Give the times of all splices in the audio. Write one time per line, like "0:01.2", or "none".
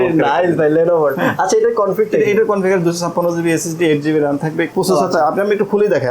0:04.7